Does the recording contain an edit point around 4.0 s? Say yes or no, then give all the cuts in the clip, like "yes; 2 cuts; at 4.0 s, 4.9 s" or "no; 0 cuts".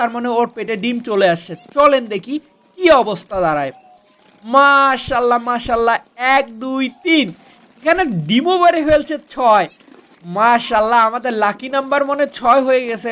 no; 0 cuts